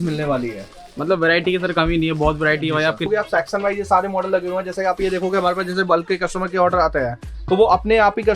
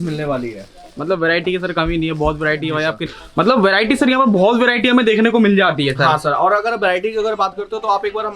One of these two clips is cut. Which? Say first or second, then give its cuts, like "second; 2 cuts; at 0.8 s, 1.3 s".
first; 1 cut; at 3.1 s